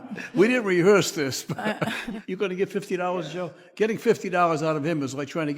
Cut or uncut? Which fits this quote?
cut